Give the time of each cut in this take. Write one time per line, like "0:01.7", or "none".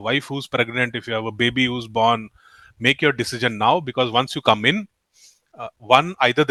none